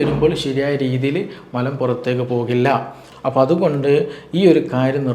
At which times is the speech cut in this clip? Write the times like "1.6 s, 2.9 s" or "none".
3.1 s